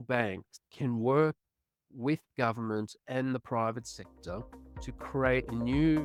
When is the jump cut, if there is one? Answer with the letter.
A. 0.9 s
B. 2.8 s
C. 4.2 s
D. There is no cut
D